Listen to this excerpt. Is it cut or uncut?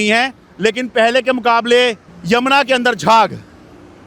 cut